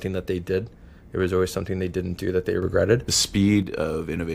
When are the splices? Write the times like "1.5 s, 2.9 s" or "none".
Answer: 3.1 s